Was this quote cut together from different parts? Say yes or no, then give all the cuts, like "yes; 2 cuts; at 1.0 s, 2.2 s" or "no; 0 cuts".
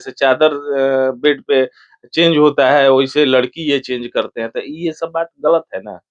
no; 0 cuts